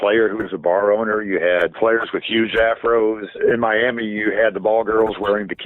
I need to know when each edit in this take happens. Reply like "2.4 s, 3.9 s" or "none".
1.7 s, 3.3 s